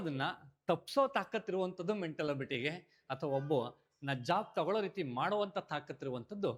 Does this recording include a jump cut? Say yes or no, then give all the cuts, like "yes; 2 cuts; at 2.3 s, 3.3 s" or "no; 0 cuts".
no; 0 cuts